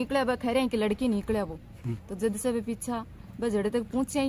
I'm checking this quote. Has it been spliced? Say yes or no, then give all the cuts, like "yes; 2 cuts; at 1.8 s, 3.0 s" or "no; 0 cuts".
no; 0 cuts